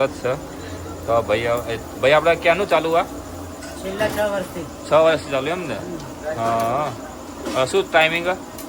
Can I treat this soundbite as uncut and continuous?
yes; 0 cuts

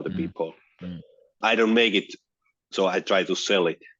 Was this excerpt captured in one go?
no; 1 cut; at 1.4 s

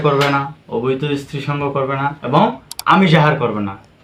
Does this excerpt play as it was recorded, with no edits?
yes; 0 cuts

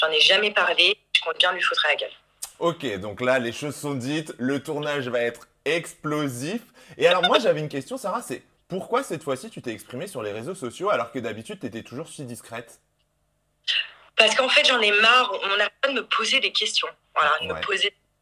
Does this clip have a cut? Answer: no; 0 cuts

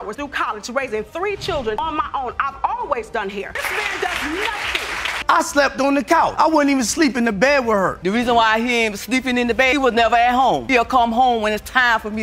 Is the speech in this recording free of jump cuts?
no; 1 cut; at 5.2 s

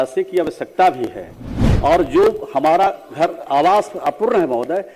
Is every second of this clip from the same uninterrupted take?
no; 1 cut; at 1.6 s

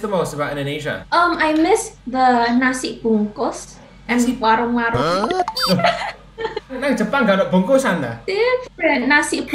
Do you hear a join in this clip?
yes; 2 cuts; at 1.0 s, 8.2 s

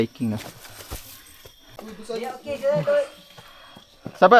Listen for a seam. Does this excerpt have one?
no; 0 cuts

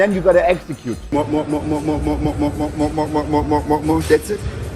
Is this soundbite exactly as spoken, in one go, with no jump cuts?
no; 1 cut; at 1.0 s

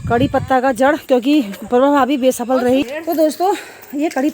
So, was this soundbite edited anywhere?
yes; 1 cut; at 2.8 s

